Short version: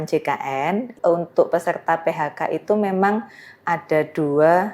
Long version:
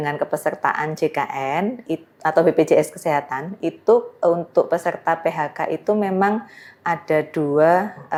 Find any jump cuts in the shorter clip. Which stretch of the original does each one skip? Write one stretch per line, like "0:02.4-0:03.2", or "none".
0:01.8-0:04.1